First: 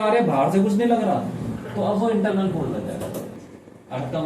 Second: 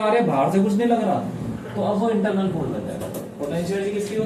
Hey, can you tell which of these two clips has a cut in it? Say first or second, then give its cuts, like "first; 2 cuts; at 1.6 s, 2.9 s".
first; 1 cut; at 3.3 s